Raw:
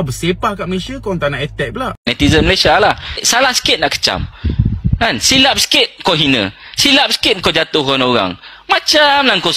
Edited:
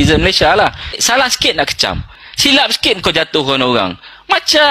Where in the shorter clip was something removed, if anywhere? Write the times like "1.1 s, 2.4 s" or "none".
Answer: 2.2 s